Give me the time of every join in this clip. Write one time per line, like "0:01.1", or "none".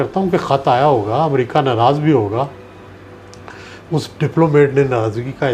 none